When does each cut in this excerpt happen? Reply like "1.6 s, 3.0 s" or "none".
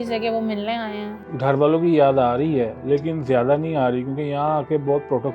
1.2 s

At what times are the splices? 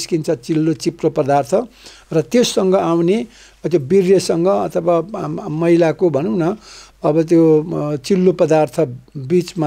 none

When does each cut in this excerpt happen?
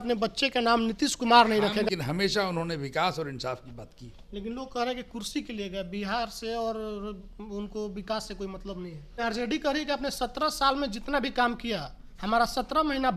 1.9 s, 9.2 s

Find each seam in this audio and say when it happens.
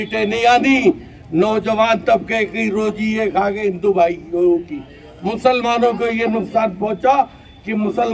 none

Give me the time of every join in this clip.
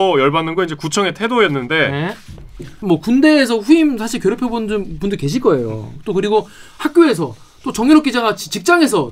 2.7 s

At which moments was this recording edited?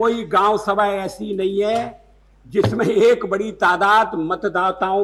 none

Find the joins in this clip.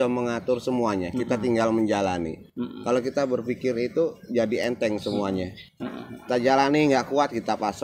none

